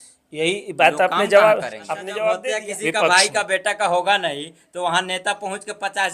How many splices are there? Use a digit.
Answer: 1